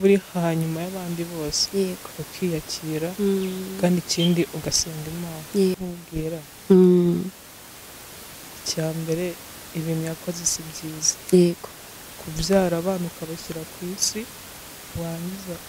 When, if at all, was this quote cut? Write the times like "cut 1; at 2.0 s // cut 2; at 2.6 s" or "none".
cut 1; at 5.8 s